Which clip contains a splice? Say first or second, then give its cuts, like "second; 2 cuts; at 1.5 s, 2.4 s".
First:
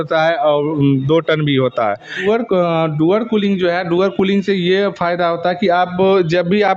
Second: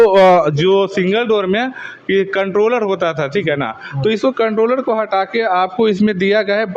first; 1 cut; at 2.1 s